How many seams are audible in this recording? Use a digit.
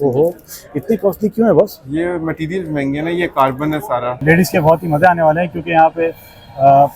1